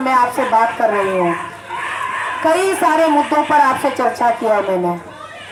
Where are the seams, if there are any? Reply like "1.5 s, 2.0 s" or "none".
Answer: none